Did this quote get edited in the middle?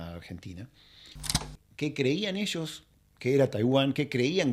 yes; 1 cut; at 1.4 s

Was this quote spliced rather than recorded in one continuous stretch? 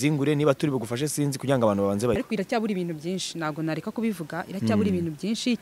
yes; 1 cut; at 2.2 s

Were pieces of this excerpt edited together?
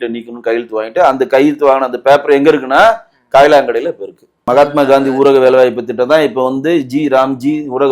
yes; 1 cut; at 4.4 s

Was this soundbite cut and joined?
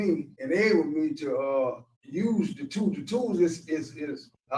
no; 0 cuts

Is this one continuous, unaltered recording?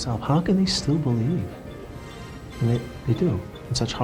yes; 0 cuts

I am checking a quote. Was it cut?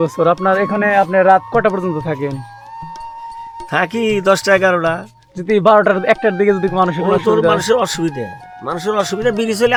no; 0 cuts

